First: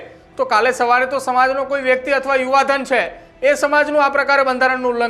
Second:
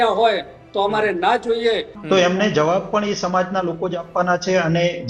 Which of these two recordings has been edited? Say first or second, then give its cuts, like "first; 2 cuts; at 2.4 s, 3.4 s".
second; 1 cut; at 1.9 s